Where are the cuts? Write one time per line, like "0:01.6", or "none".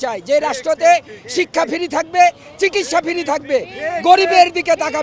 none